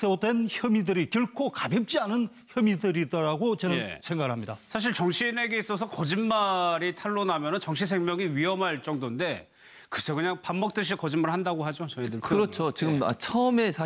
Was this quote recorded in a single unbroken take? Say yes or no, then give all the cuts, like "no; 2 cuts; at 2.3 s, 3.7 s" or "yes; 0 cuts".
no; 1 cut; at 3.0 s